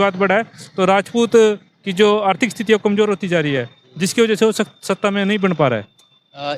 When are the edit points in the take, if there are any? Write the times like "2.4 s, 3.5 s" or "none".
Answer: none